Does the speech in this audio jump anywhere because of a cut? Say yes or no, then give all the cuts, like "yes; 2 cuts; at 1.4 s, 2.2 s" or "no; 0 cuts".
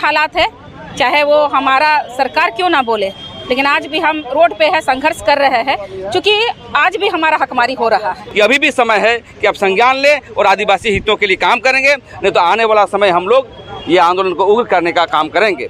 yes; 1 cut; at 8.2 s